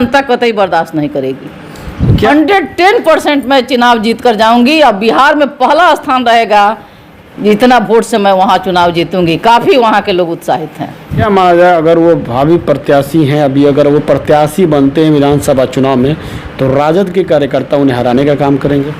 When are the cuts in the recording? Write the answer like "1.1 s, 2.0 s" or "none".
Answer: 2.3 s, 11.2 s